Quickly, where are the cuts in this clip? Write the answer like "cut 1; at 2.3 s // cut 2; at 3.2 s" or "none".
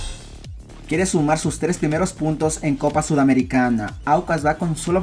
none